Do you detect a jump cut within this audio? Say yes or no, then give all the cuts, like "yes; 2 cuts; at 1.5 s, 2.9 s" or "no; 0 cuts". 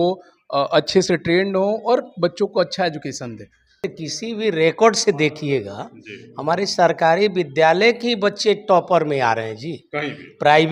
yes; 1 cut; at 3.9 s